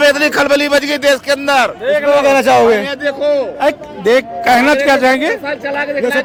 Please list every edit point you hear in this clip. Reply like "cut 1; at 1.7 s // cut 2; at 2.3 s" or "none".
none